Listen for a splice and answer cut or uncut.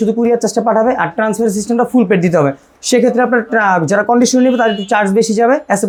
uncut